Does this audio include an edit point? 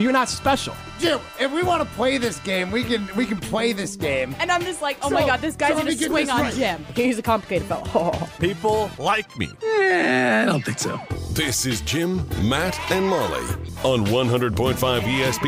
no; 0 cuts

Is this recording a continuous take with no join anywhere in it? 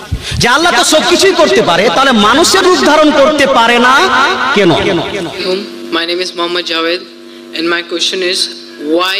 yes; 0 cuts

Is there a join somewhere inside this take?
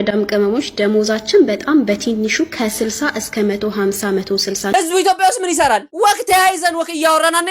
yes; 1 cut; at 4.7 s

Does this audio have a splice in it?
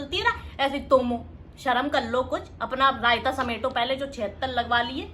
no; 0 cuts

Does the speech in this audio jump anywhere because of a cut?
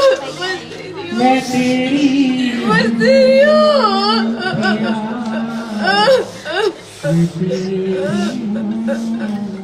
no; 0 cuts

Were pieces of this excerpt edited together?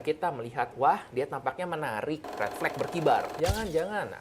yes; 2 cuts; at 2.3 s, 3.3 s

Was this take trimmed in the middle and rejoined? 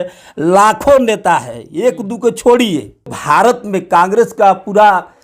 yes; 1 cut; at 3.2 s

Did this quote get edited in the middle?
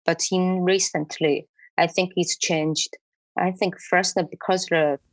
no; 0 cuts

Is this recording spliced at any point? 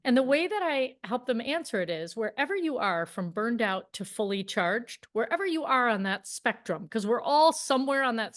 no; 0 cuts

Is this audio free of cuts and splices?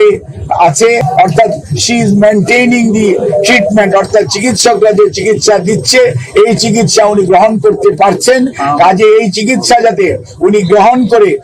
no; 1 cut; at 1.1 s

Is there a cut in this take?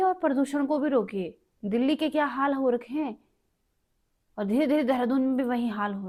no; 0 cuts

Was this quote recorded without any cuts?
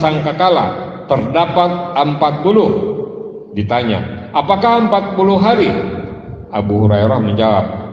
yes; 0 cuts

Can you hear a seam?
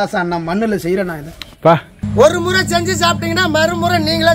yes; 1 cut; at 1.7 s

